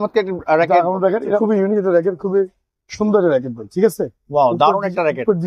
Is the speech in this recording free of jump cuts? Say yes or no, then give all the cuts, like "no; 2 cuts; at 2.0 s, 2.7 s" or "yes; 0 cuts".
no; 1 cut; at 1.4 s